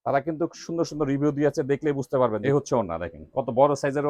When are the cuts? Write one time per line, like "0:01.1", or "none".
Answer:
0:02.4